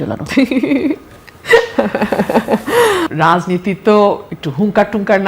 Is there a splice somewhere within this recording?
yes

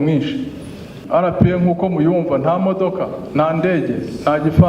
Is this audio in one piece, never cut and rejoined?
no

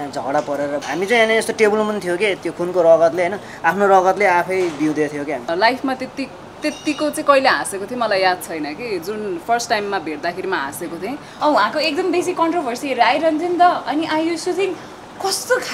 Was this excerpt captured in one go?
no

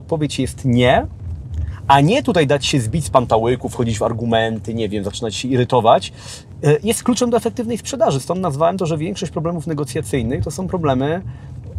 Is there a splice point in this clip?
no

